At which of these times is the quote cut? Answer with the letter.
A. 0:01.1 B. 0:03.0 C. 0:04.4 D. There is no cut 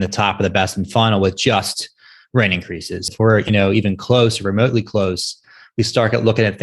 B